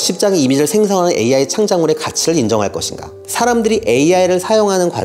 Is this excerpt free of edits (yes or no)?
no